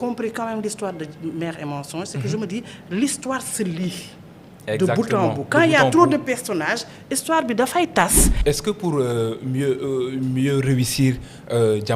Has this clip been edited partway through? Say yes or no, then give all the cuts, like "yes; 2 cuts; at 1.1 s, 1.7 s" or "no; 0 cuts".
yes; 1 cut; at 8.3 s